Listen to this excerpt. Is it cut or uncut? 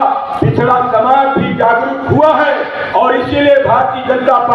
uncut